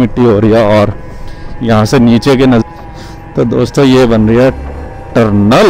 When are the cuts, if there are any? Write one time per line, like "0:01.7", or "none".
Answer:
0:02.6